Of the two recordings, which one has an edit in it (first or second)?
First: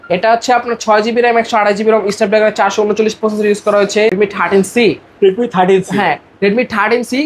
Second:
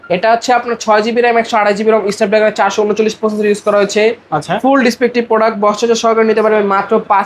first